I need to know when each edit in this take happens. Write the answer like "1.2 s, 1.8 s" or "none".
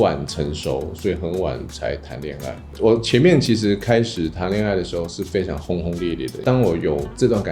2.5 s, 6.3 s